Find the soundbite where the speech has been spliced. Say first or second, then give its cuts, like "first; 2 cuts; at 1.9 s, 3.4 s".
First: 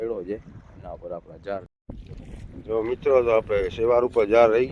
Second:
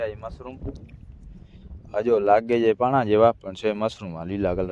first; 1 cut; at 1.7 s